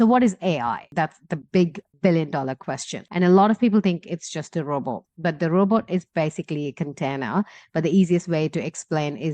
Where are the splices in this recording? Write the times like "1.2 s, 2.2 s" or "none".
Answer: 0.8 s, 3.0 s